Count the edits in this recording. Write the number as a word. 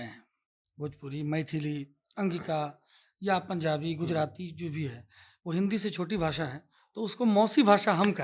zero